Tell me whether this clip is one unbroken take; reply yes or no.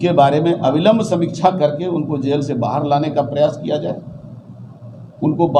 yes